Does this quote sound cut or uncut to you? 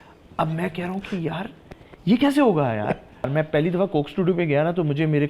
cut